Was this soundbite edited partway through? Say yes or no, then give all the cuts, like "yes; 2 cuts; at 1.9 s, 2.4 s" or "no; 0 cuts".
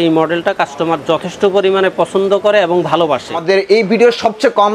yes; 1 cut; at 3.4 s